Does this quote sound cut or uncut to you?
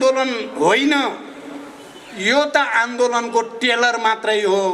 uncut